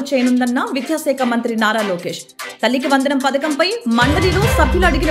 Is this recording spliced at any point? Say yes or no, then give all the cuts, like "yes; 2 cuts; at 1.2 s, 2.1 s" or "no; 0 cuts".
no; 0 cuts